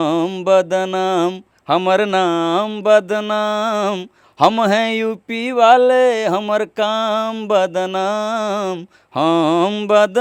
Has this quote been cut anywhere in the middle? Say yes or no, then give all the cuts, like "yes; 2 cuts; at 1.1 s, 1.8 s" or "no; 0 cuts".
no; 0 cuts